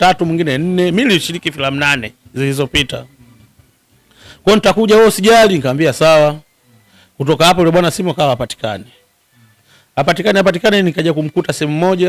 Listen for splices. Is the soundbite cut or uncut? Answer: uncut